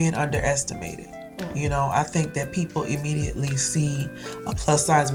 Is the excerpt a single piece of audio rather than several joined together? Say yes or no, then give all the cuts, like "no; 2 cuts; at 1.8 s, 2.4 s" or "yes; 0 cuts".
yes; 0 cuts